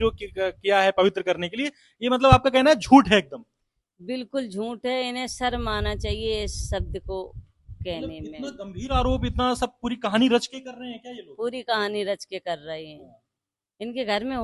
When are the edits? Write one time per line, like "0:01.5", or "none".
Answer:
none

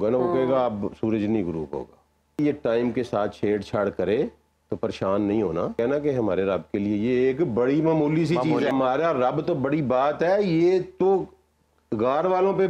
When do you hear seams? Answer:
none

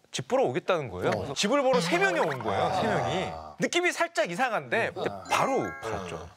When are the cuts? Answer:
0:01.3
0:05.1

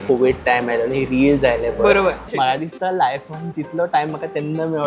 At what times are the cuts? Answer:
0:02.2

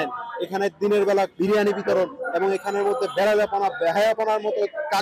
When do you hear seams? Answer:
none

